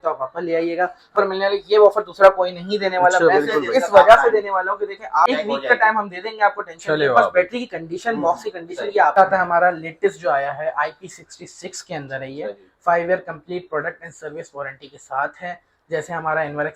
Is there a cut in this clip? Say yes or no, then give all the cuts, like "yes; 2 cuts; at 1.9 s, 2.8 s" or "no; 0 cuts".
yes; 3 cuts; at 1.1 s, 5.3 s, 9.2 s